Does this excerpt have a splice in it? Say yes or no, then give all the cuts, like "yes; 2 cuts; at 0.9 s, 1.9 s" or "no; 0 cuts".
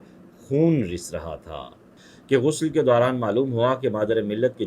yes; 1 cut; at 2.1 s